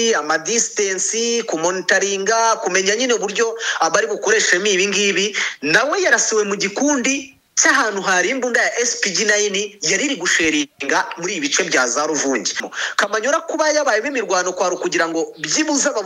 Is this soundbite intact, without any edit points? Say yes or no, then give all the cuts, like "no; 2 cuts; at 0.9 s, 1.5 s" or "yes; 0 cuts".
no; 1 cut; at 12.7 s